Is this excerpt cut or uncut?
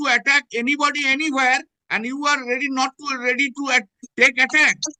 uncut